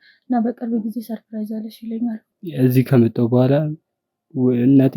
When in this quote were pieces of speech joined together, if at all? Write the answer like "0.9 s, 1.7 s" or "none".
2.3 s

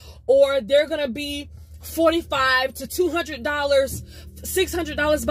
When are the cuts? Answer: none

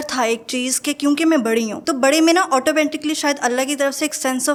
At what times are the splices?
none

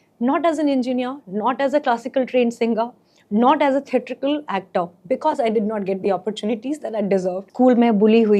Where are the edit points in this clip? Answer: 7.4 s

